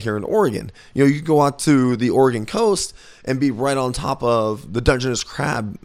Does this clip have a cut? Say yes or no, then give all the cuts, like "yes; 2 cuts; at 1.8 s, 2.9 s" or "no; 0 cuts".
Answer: no; 0 cuts